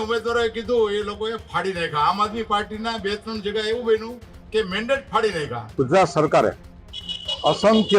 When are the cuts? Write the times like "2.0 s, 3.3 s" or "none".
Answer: 5.6 s